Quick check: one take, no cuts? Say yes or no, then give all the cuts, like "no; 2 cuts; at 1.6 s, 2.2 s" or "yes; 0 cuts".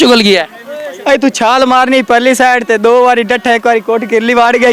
yes; 0 cuts